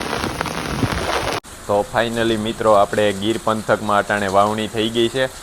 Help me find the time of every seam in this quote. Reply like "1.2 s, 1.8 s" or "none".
1.4 s